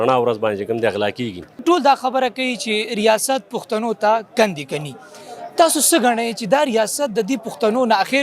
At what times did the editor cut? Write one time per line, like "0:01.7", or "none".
0:01.6